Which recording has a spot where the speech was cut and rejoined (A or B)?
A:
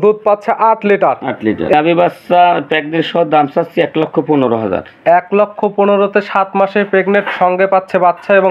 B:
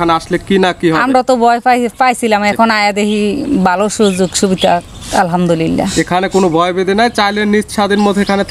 A